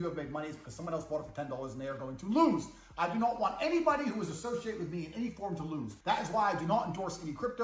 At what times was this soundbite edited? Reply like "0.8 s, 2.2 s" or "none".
5.9 s